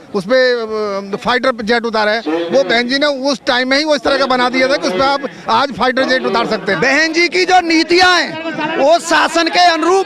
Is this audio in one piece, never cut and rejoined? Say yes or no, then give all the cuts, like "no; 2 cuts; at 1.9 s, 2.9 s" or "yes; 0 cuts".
no; 1 cut; at 6.6 s